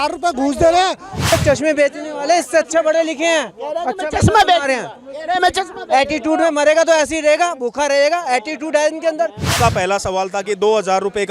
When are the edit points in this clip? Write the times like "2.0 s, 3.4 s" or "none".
1.2 s, 9.5 s